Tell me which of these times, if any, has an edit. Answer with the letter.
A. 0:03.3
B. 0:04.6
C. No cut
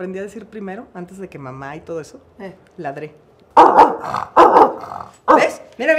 A